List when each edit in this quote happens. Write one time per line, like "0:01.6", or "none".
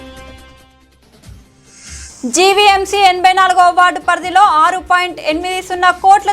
0:02.1